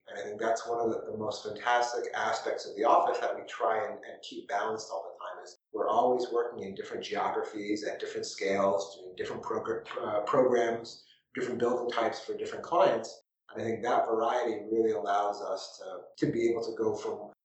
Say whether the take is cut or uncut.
uncut